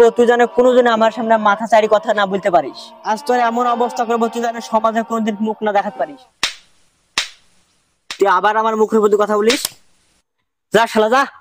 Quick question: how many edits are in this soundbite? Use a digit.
1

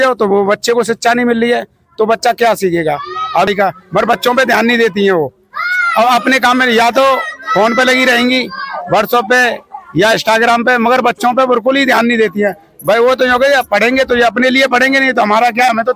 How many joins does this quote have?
1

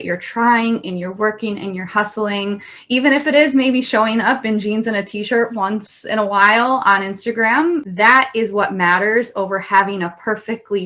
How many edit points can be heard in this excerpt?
1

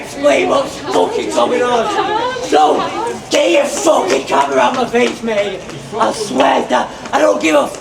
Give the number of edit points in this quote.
0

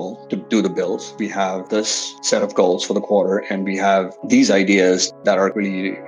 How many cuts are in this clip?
1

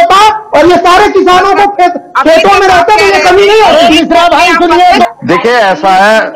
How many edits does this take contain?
1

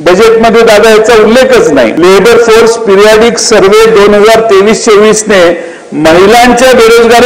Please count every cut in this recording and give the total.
1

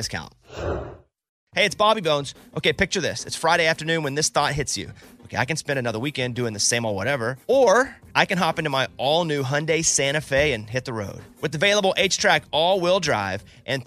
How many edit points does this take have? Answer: 1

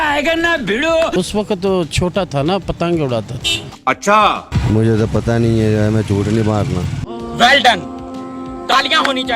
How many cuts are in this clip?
2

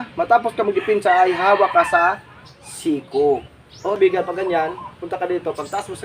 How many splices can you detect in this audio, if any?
1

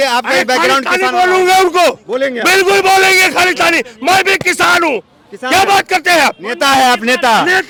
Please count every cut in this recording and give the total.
0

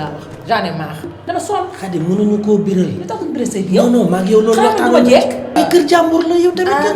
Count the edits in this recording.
1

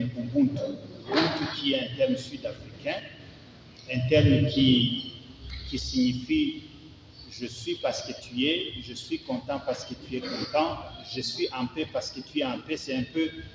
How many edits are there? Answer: 1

